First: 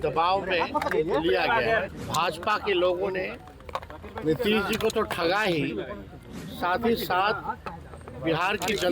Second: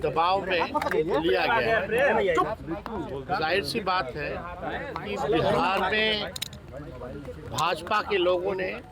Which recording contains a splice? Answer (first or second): first